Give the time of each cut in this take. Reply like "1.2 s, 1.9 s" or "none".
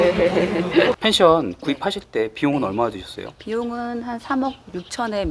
1.0 s